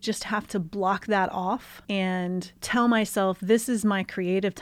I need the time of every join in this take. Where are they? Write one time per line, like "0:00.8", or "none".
0:02.0